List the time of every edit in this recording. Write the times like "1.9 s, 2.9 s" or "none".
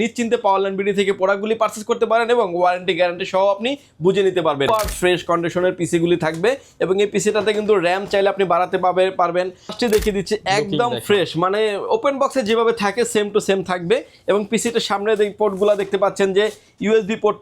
4.7 s, 9.7 s

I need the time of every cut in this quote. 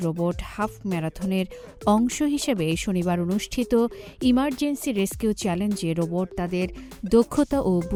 none

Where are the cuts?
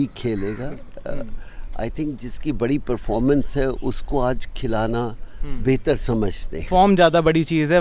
none

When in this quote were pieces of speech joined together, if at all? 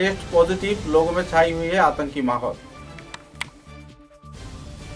none

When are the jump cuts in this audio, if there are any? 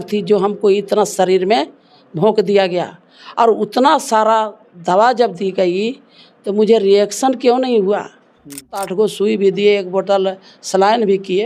8.9 s

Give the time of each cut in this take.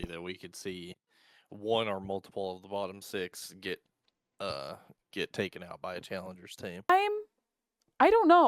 6.9 s

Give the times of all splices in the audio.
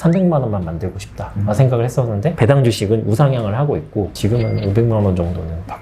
2.3 s

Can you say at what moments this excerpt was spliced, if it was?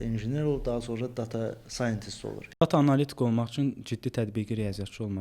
2.6 s

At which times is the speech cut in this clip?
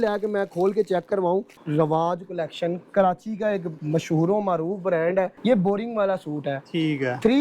1.5 s, 3.7 s, 5.3 s

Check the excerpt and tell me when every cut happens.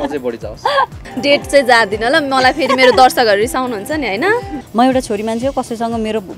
1.0 s, 4.6 s

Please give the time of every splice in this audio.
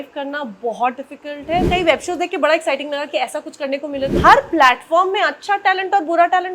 1.7 s, 4.2 s

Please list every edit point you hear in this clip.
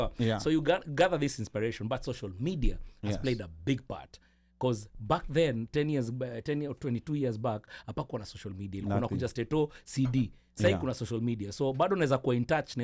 none

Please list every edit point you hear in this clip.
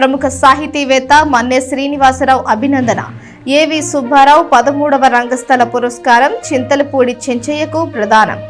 none

